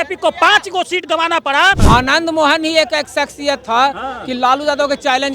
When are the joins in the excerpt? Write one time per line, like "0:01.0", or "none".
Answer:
0:01.8